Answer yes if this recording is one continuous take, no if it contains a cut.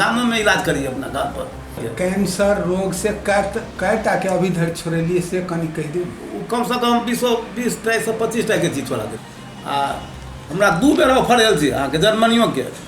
no